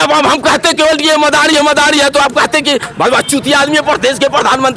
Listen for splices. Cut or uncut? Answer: uncut